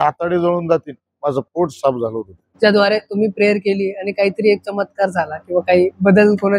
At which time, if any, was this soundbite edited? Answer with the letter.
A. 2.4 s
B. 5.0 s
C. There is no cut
A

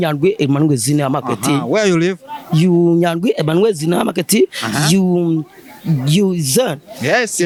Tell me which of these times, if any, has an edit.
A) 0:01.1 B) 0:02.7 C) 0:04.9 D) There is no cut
D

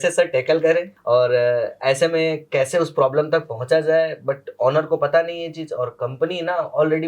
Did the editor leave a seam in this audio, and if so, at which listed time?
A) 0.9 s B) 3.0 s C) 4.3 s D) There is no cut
A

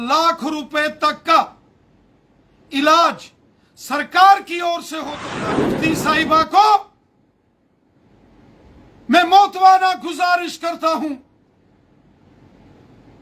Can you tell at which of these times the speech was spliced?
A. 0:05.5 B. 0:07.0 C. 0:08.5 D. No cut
A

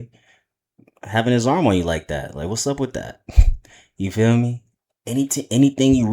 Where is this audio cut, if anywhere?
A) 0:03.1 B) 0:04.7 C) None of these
B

